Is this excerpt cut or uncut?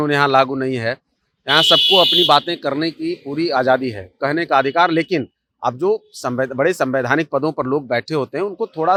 uncut